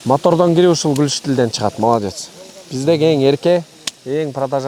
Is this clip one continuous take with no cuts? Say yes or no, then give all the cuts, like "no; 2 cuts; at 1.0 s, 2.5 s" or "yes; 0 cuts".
yes; 0 cuts